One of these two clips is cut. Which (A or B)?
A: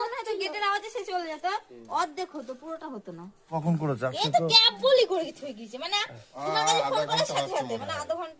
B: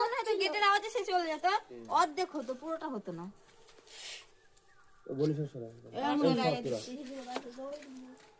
A